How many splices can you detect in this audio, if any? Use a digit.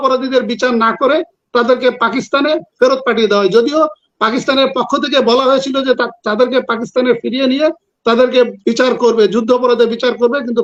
0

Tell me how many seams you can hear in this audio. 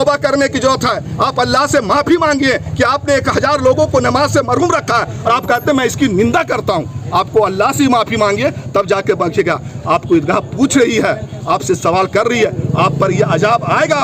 0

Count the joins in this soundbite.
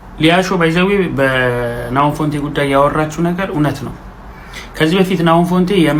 0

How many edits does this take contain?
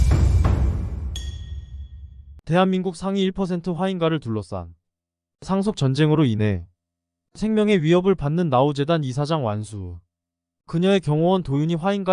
1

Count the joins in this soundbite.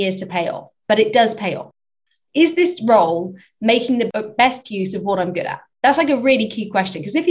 3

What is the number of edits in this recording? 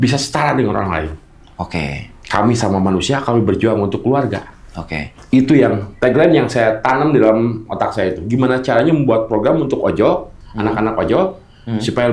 0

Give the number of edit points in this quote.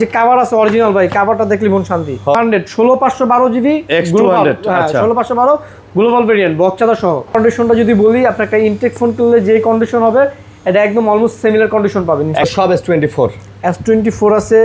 3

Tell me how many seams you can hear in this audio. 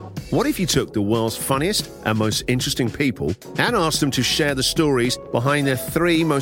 1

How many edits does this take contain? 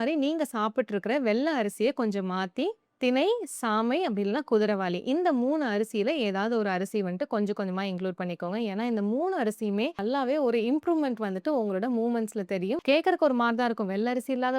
2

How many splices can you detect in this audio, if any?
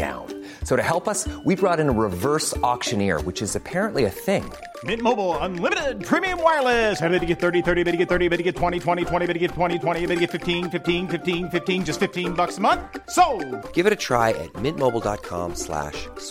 0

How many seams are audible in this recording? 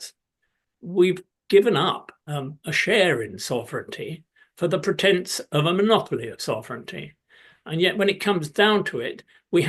0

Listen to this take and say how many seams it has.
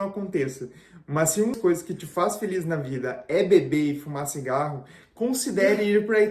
1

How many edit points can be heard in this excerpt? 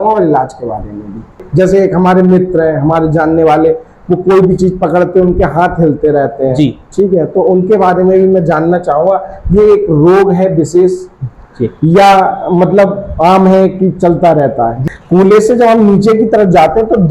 2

